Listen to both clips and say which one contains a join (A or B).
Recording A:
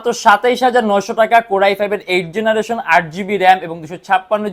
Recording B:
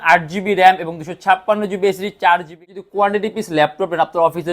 B